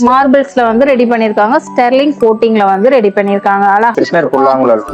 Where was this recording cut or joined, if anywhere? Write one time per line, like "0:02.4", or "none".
0:03.9